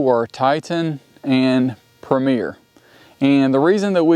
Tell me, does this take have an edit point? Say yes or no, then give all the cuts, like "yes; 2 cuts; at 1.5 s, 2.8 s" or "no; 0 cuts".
no; 0 cuts